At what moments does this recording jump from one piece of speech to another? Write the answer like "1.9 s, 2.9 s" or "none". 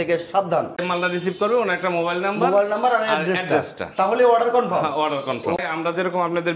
0.8 s, 5.6 s